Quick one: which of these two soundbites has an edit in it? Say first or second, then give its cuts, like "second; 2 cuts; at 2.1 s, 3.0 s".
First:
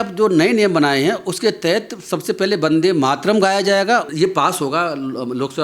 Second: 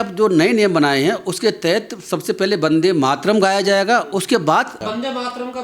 first; 1 cut; at 4.1 s